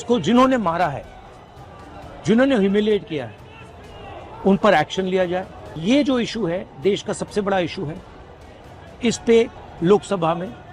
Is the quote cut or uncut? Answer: cut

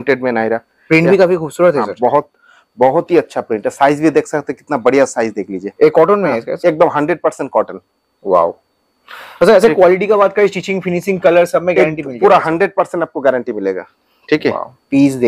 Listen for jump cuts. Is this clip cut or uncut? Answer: uncut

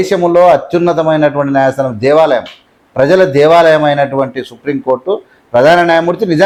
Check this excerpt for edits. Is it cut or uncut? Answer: uncut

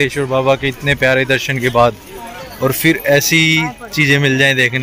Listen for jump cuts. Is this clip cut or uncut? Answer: uncut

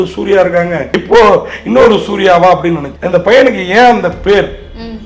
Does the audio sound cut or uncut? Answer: cut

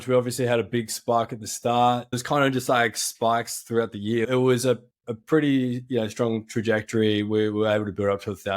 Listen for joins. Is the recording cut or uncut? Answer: cut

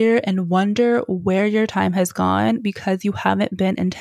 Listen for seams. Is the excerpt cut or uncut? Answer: uncut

